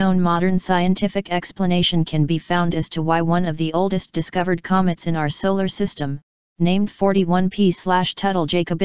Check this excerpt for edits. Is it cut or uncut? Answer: cut